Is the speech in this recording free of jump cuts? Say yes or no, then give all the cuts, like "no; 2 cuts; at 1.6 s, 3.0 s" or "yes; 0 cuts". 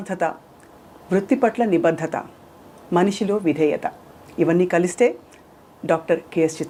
yes; 0 cuts